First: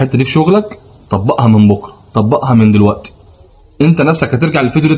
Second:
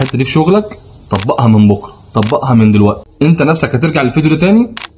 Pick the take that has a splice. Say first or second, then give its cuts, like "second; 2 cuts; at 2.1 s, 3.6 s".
second; 1 cut; at 3.1 s